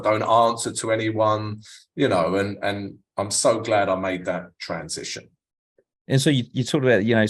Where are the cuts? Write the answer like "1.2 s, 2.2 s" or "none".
none